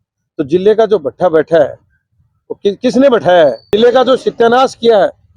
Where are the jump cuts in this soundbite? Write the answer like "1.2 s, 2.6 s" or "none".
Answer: 3.7 s